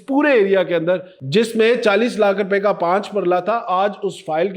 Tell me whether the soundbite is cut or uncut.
cut